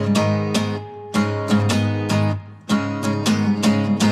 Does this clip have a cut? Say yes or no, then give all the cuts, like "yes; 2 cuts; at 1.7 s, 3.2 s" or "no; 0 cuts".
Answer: no; 0 cuts